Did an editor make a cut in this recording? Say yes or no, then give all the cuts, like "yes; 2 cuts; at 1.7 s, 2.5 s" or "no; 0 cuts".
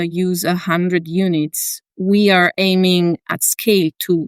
yes; 1 cut; at 3.2 s